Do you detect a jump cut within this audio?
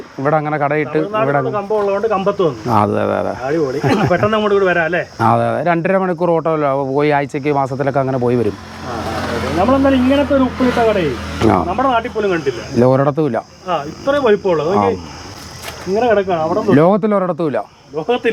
no; 0 cuts

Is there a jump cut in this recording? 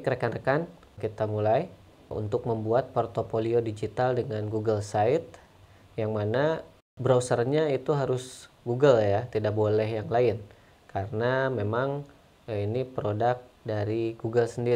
yes; 3 cuts; at 1.0 s, 2.1 s, 6.9 s

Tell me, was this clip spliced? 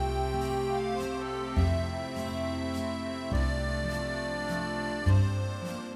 no; 0 cuts

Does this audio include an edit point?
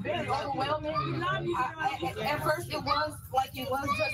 no; 0 cuts

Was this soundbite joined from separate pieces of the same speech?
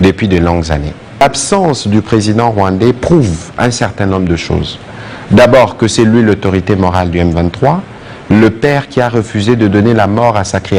yes; 1 cut; at 1.2 s

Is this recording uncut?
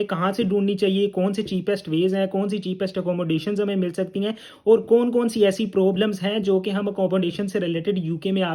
yes; 0 cuts

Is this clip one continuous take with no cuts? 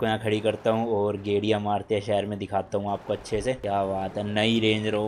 no; 1 cut; at 3.6 s

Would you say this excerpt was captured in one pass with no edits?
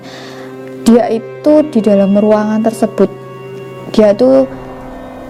yes; 0 cuts

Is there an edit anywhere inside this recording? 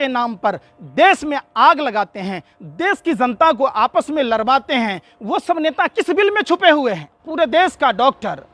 yes; 1 cut; at 7.2 s

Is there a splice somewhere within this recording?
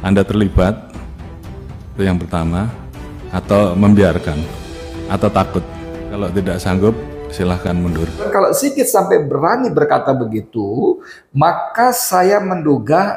yes; 2 cuts; at 6.2 s, 8.3 s

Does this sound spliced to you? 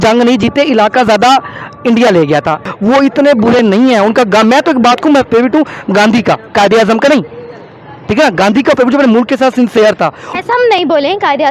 no; 0 cuts

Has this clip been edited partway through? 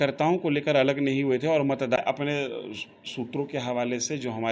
yes; 1 cut; at 2.0 s

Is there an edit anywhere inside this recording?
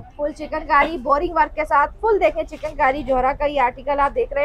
no; 0 cuts

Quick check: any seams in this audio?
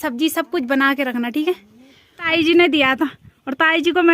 yes; 1 cut; at 2.2 s

